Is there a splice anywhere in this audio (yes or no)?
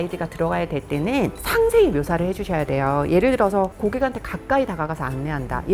no